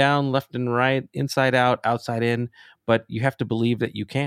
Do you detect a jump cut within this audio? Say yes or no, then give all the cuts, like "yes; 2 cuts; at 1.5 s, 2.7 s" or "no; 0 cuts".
yes; 1 cut; at 3.1 s